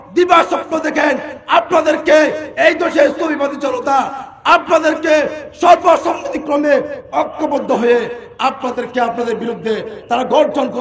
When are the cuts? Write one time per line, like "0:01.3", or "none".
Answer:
none